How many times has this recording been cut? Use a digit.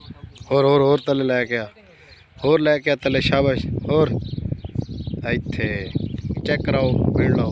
1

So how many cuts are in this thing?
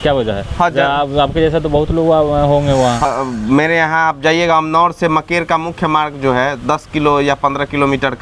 1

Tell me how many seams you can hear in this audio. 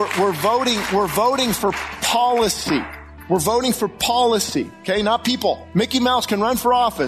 2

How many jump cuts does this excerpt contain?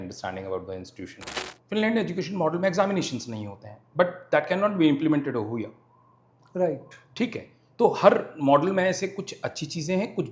1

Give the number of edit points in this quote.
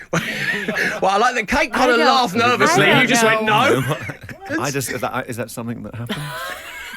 1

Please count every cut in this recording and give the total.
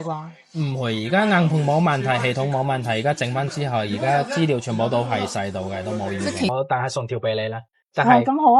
1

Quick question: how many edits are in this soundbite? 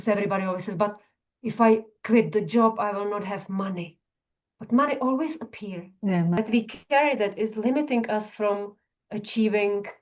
1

